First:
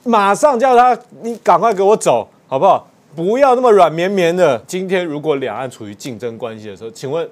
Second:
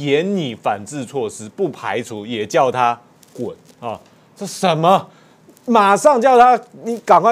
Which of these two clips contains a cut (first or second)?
first